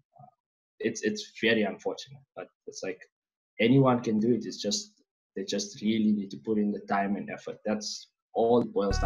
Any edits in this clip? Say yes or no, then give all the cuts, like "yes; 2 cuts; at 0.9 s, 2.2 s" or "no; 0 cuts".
no; 0 cuts